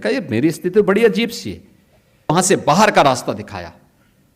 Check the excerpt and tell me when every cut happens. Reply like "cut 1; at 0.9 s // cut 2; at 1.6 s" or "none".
cut 1; at 2.3 s